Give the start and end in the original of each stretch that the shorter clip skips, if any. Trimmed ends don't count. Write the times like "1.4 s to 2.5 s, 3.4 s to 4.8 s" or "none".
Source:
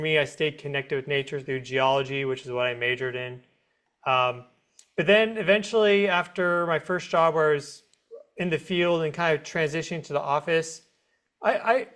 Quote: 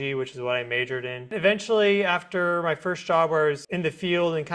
3.4 s to 5.4 s, 7.7 s to 8.3 s